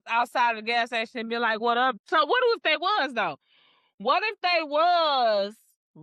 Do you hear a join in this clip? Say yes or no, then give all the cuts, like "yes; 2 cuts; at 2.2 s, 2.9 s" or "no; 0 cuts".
yes; 1 cut; at 2.0 s